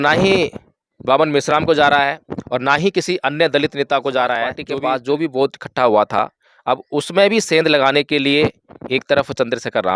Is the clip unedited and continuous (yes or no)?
no